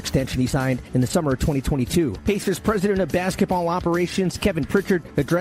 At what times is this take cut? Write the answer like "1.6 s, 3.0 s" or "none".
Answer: 2.2 s